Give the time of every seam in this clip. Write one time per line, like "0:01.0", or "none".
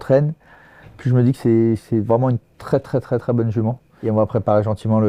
0:03.9